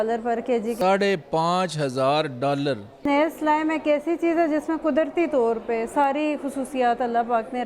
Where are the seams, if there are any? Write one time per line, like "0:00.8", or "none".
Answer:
0:03.0